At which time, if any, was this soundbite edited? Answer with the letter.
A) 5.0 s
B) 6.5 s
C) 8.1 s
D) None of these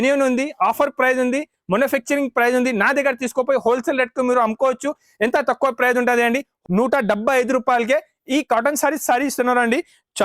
B